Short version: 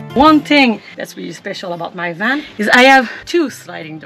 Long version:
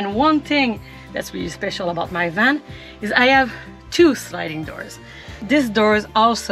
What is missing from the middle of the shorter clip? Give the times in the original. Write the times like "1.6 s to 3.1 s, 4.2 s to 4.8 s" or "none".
0.9 s to 1.1 s, 2.6 s to 2.9 s, 3.6 s to 3.8 s